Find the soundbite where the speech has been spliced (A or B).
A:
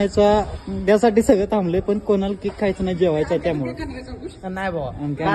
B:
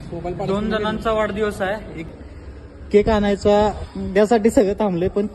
B